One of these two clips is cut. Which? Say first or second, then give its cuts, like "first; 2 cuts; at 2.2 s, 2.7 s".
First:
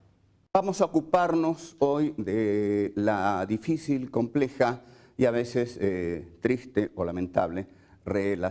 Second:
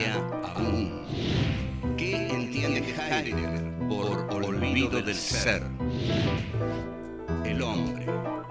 second; 1 cut; at 2.8 s